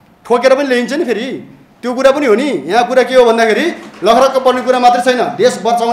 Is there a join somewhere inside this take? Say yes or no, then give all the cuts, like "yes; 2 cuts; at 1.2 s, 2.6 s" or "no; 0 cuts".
no; 0 cuts